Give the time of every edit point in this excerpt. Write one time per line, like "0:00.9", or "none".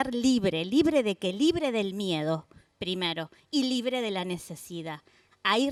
none